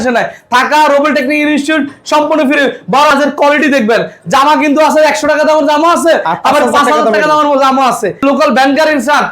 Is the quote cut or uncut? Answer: cut